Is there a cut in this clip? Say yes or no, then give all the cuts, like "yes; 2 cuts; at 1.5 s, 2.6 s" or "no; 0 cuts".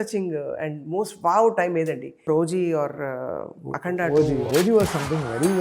yes; 2 cuts; at 2.3 s, 4.5 s